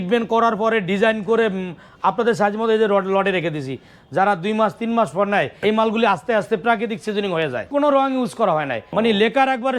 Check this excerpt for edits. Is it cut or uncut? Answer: cut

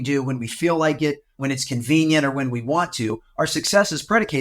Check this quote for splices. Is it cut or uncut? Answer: cut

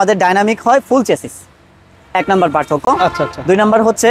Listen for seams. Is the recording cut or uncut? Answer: uncut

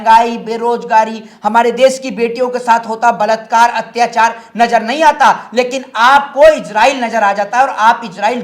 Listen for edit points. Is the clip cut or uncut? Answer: uncut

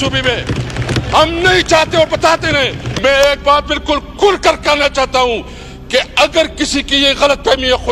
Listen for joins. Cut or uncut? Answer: cut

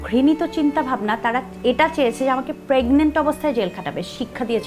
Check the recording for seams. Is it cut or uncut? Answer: uncut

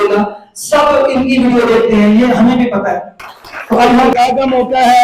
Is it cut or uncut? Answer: cut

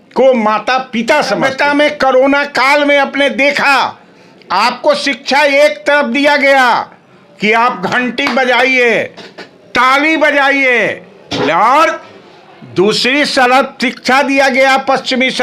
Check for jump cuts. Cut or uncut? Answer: cut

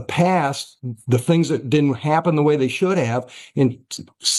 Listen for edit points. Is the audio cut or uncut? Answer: uncut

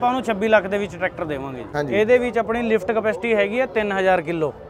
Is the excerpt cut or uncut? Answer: cut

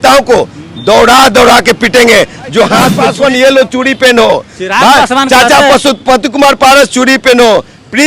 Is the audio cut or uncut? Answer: cut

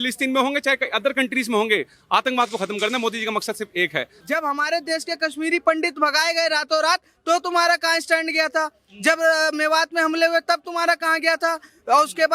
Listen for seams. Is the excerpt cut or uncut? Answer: cut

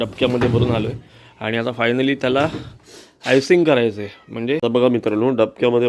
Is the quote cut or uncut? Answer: cut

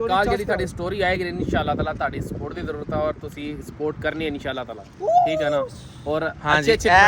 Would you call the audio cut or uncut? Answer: uncut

